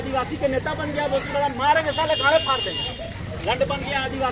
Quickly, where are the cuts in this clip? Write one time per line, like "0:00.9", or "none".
0:03.3